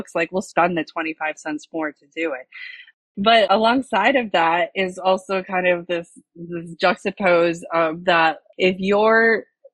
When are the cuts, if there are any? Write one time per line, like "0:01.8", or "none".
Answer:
0:08.5